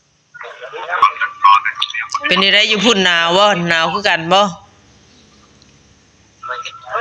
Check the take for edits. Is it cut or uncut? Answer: cut